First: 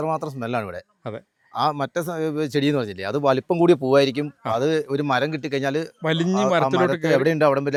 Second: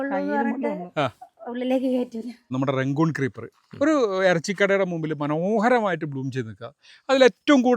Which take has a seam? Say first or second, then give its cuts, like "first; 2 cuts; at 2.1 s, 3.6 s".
second; 1 cut; at 2.4 s